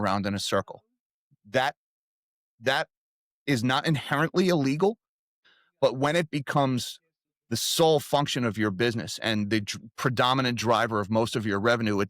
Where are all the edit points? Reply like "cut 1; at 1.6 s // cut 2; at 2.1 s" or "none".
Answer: cut 1; at 5.4 s